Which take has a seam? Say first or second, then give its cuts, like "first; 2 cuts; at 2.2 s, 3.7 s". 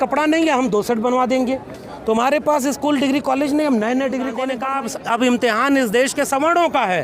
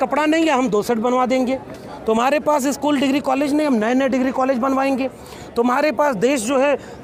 first; 1 cut; at 4.5 s